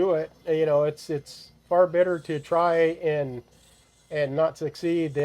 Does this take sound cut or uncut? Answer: uncut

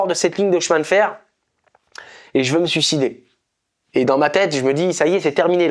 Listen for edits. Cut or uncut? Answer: uncut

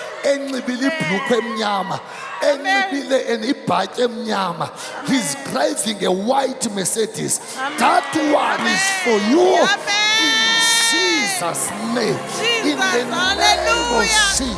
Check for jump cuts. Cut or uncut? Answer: uncut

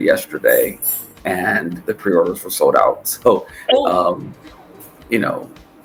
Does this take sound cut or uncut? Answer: uncut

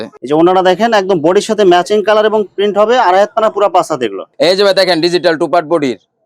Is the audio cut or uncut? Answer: cut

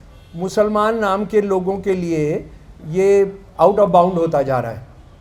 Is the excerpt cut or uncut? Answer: uncut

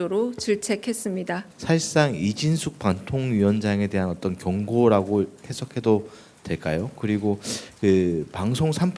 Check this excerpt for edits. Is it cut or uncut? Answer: cut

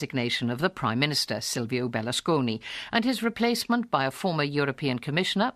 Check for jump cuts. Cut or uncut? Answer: cut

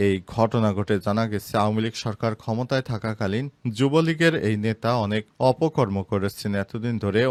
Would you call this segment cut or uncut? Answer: uncut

